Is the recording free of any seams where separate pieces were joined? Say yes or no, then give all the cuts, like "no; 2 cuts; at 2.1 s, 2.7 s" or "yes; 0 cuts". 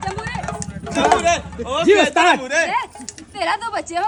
yes; 0 cuts